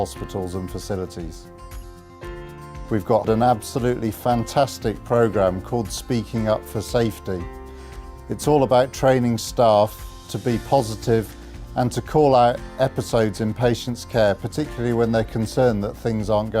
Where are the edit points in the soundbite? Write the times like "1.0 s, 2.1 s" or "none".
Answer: 15.2 s